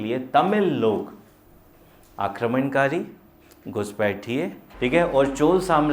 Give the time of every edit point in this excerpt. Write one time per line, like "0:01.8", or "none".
0:04.6

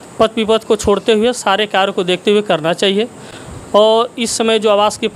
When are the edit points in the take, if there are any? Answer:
none

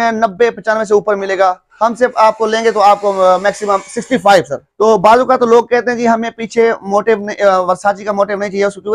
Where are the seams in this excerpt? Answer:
0:04.6

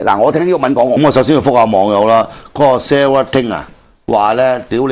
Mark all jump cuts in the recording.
0:01.0

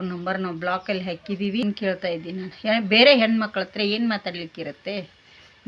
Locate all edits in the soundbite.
0:01.6

